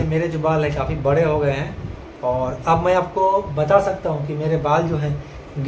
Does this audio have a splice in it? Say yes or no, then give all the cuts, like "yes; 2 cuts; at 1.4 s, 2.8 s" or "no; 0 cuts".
no; 0 cuts